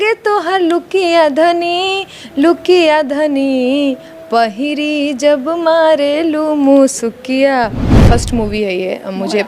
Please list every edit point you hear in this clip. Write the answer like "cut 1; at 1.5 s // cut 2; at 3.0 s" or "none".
cut 1; at 8.0 s